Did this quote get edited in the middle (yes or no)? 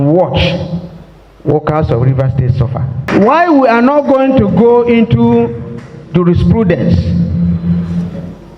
yes